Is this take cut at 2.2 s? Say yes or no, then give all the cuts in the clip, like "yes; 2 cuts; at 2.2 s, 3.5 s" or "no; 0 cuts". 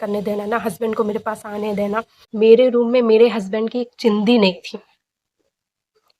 yes; 1 cut; at 2.2 s